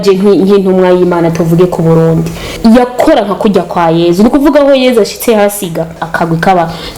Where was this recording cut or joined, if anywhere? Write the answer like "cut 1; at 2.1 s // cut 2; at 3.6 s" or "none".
cut 1; at 2.4 s // cut 2; at 6.0 s